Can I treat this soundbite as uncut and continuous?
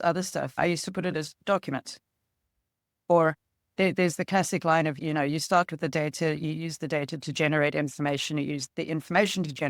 no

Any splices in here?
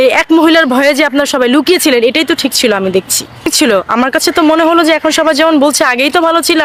no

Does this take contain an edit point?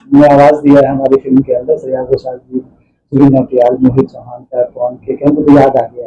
no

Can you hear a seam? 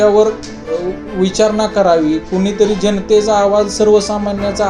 no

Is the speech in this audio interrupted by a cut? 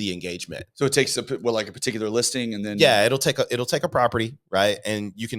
no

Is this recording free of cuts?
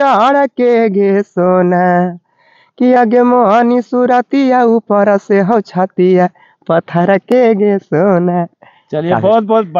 yes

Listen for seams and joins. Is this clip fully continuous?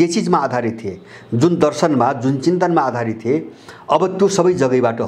yes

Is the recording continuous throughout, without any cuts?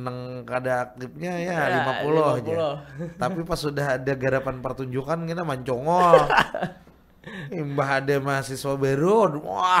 yes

